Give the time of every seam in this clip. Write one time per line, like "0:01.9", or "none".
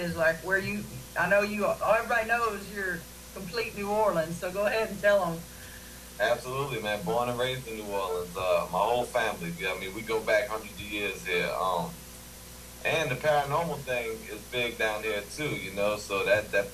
0:10.5